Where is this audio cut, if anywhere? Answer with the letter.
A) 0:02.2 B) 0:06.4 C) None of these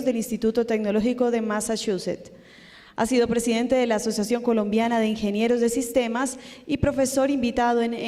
C